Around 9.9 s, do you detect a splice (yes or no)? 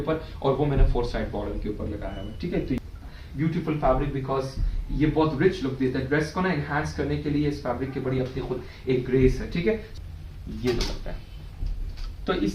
yes